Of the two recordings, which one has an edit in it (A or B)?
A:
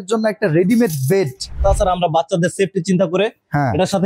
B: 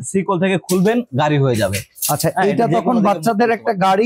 A